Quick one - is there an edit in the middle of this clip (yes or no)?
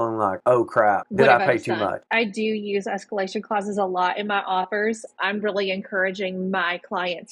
yes